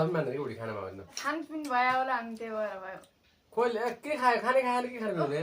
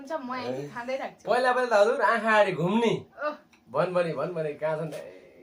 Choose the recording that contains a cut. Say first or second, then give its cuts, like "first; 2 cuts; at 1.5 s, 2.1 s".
first; 1 cut; at 1.2 s